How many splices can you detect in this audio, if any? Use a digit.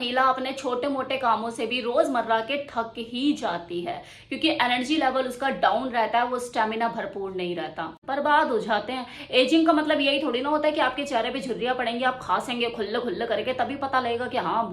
1